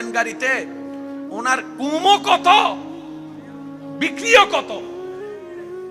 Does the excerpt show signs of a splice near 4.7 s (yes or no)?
yes